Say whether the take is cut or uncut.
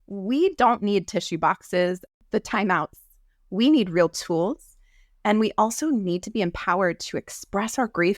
cut